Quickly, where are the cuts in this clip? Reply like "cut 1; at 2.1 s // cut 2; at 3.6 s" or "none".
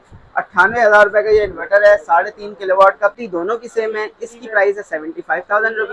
cut 1; at 3.2 s